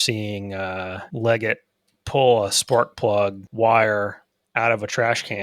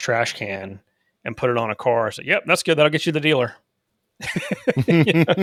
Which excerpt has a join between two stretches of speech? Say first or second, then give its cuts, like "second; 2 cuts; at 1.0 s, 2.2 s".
first; 2 cuts; at 1.0 s, 3.4 s